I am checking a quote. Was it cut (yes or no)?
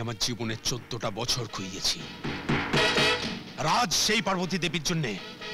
no